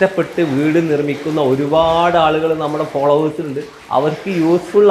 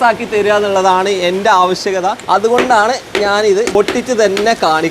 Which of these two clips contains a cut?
second; 2 cuts; at 2.2 s, 3.7 s

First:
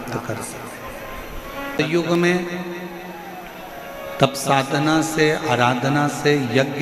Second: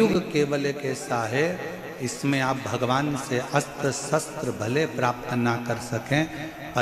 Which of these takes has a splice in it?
first; 1 cut; at 1.8 s

